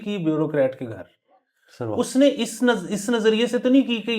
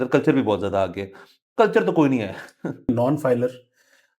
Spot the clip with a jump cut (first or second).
second